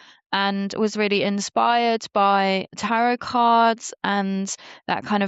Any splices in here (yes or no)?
yes